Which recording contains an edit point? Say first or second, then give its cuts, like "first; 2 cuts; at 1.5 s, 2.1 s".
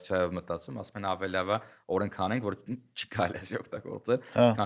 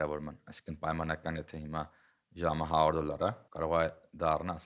second; 1 cut; at 3.5 s